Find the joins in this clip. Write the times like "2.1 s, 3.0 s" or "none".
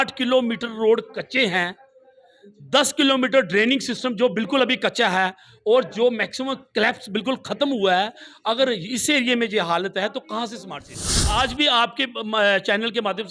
11.2 s